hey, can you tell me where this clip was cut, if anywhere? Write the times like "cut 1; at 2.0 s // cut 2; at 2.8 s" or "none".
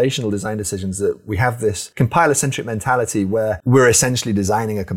cut 1; at 1.8 s // cut 2; at 3.6 s

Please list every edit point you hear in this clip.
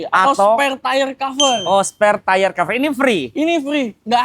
none

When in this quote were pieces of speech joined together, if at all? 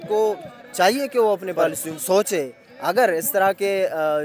cut 1; at 1.9 s

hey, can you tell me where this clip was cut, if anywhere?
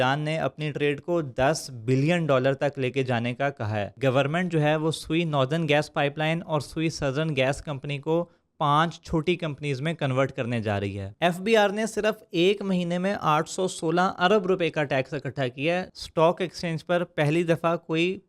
cut 1; at 3.9 s // cut 2; at 11.1 s // cut 3; at 15.9 s

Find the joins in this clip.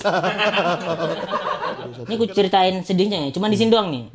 cut 1; at 2.0 s

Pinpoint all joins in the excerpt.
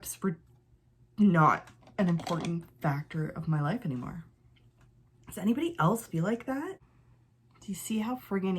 cut 1; at 6.9 s

